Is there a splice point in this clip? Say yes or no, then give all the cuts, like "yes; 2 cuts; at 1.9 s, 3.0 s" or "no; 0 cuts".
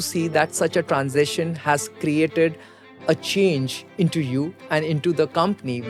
no; 0 cuts